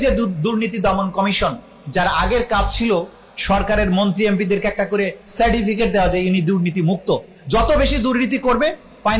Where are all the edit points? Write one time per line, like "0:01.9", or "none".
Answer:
none